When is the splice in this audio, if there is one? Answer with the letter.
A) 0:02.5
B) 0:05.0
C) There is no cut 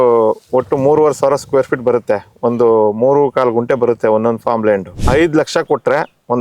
B